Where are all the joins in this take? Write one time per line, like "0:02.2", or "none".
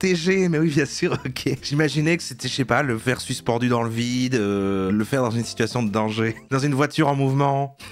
0:04.9